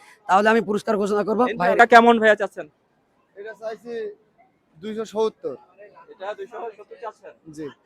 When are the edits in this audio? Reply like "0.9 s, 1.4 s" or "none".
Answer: 1.8 s